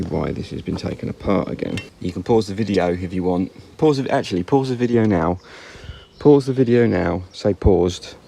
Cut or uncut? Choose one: cut